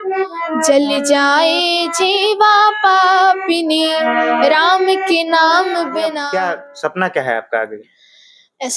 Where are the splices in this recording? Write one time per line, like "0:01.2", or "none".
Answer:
0:06.2